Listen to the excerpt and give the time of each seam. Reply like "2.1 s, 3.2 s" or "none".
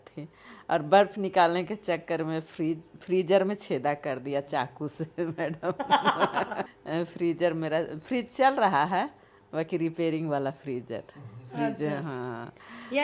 none